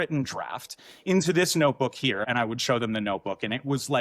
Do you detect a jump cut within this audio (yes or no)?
yes